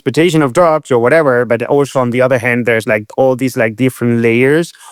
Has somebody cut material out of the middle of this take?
no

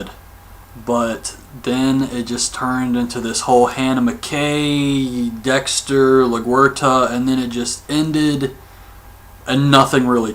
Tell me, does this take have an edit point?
yes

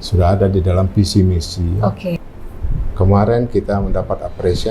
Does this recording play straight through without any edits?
no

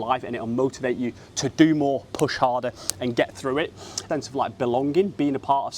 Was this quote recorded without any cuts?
no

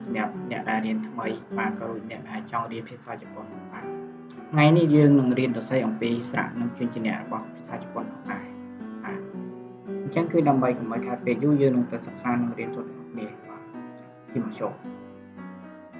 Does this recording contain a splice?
yes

